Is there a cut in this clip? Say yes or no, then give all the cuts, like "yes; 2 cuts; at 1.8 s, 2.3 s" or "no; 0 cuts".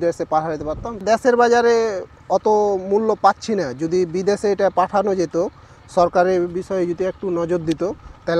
yes; 1 cut; at 1.0 s